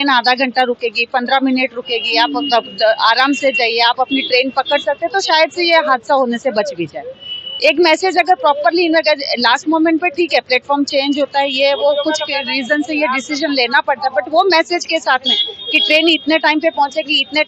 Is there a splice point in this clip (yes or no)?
no